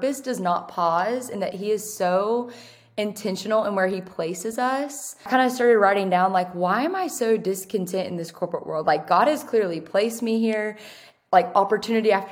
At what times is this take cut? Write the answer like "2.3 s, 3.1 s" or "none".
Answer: 5.3 s